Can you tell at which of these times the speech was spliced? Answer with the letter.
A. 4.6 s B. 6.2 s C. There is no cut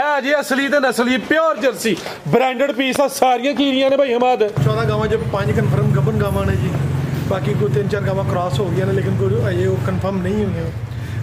A